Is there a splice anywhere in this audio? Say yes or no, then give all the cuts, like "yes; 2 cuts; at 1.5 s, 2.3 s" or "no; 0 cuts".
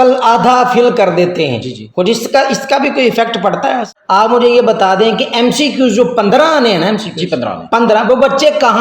yes; 1 cut; at 3.9 s